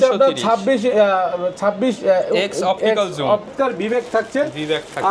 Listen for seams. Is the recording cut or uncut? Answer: cut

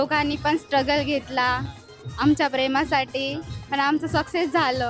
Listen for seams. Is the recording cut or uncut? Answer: uncut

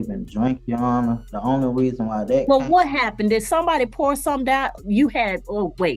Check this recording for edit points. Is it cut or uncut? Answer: uncut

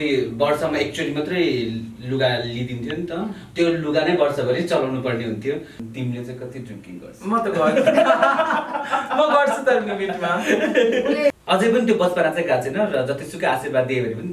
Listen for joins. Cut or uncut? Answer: cut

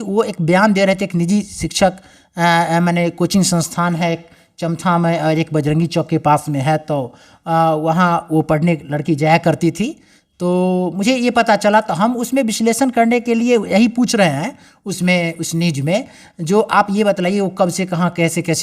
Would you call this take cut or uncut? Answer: uncut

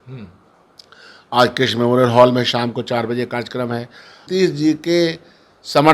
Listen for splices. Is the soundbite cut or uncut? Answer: cut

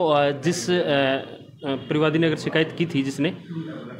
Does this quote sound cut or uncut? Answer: uncut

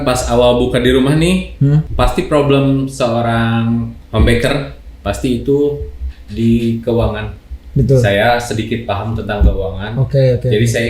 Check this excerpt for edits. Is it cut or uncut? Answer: cut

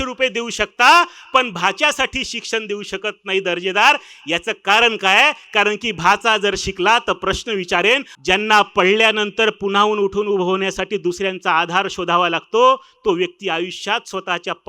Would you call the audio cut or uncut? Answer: cut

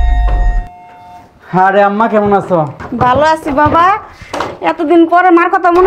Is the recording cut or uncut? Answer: uncut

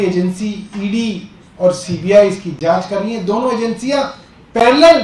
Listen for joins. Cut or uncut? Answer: uncut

